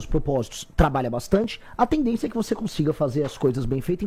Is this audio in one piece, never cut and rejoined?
yes; 0 cuts

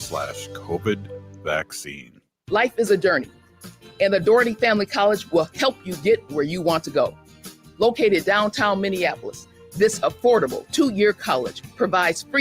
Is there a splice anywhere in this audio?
yes; 1 cut; at 2.3 s

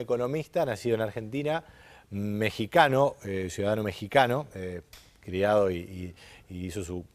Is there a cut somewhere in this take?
yes; 1 cut; at 4.6 s

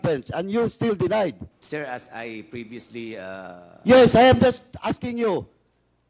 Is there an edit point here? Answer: yes; 1 cut; at 1.5 s

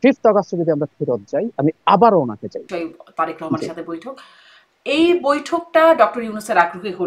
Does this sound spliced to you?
yes; 1 cut; at 2.7 s

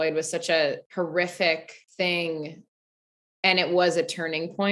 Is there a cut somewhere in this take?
yes; 2 cuts; at 0.8 s, 1.8 s

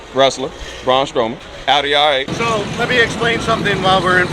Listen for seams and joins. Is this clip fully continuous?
no; 2 cuts; at 1.5 s, 2.3 s

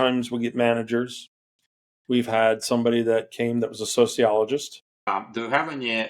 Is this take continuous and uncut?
no; 1 cut; at 5.1 s

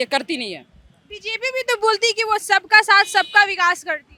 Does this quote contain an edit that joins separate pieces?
no; 0 cuts

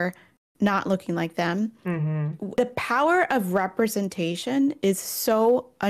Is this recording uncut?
no; 1 cut; at 2.5 s

